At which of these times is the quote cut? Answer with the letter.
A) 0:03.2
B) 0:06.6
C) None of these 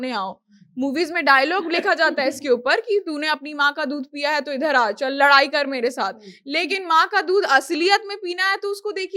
C